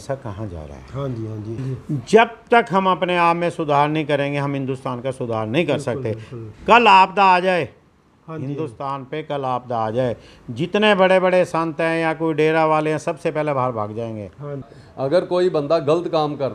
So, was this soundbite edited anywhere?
yes; 2 cuts; at 1.6 s, 14.8 s

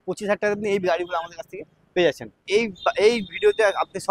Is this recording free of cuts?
no; 1 cut; at 2.5 s

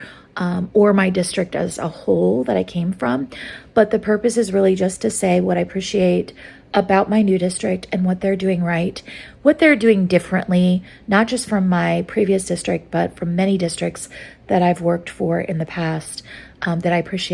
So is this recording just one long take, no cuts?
yes; 0 cuts

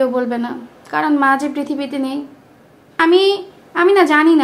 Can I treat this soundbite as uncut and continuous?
yes; 0 cuts

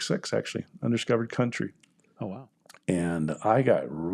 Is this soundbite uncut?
no; 1 cut; at 2.3 s

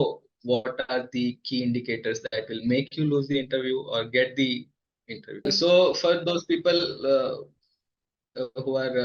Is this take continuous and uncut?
no; 1 cut; at 5.4 s

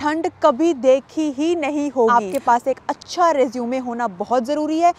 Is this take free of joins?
no; 1 cut; at 2.1 s

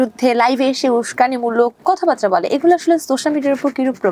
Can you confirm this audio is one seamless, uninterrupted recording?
yes; 0 cuts

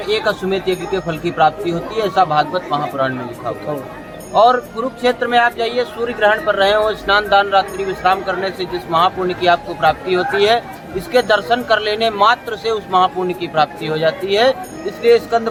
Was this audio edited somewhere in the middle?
no; 0 cuts

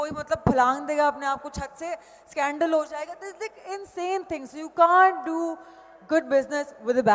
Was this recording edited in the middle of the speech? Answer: no; 0 cuts

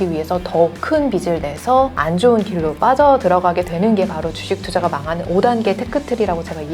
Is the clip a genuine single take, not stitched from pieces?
yes; 0 cuts

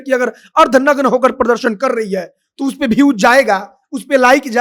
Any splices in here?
no; 0 cuts

